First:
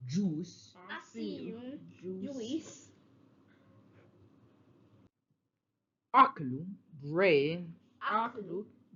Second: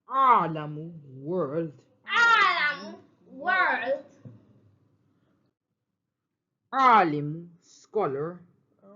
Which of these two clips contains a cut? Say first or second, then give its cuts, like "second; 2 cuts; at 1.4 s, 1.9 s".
second; 1 cut; at 6.8 s